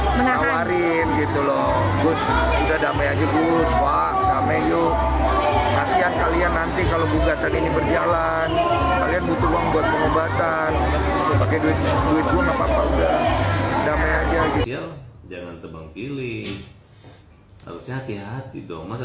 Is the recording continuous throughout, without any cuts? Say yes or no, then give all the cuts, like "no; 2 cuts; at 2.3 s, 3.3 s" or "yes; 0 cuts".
no; 1 cut; at 14.6 s